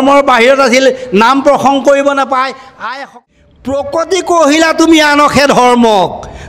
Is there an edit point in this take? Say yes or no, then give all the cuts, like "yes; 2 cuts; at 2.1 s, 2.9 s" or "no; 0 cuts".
yes; 1 cut; at 3.2 s